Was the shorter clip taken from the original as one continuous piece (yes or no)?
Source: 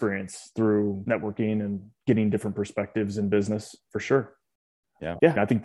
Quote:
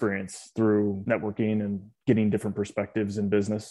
yes